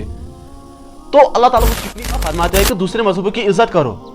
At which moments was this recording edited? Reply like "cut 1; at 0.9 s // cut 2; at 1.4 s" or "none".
cut 1; at 2.1 s